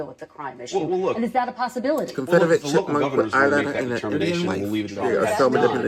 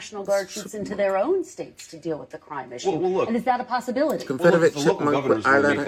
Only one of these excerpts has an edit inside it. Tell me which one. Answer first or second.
first